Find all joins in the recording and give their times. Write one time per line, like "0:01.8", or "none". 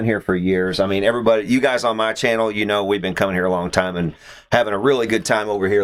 none